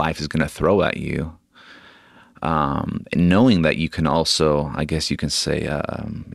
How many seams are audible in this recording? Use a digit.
0